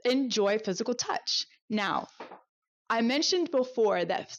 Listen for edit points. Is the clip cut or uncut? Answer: uncut